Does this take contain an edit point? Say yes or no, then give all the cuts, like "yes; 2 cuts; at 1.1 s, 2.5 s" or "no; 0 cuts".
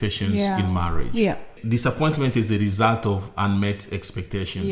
no; 0 cuts